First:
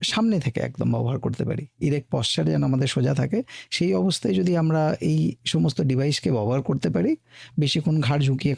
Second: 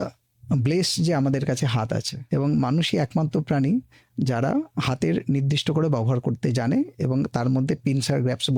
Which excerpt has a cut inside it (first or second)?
second